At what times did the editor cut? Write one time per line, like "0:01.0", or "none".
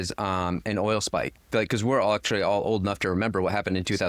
none